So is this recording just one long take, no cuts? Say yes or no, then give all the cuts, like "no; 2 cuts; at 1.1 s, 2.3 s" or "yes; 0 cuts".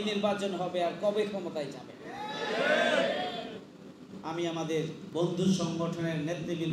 no; 1 cut; at 5.0 s